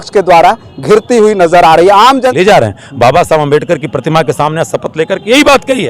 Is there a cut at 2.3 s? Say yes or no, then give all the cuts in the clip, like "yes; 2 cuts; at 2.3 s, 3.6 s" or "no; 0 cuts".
yes; 1 cut; at 2.3 s